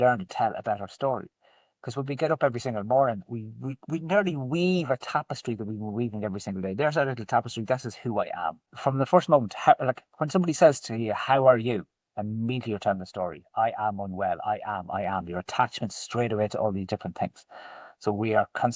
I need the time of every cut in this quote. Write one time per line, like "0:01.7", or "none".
0:08.7